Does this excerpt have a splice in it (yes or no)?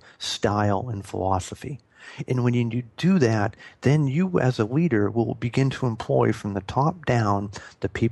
no